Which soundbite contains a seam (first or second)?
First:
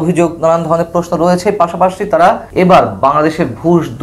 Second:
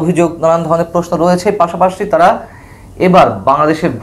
first